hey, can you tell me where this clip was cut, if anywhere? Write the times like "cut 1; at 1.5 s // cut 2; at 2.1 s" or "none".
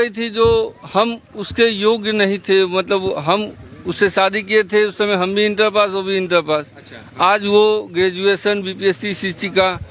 none